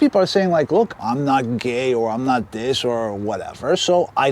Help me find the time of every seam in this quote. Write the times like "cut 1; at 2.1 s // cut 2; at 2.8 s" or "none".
cut 1; at 1.0 s